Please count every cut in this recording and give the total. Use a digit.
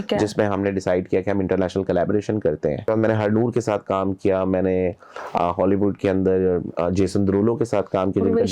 1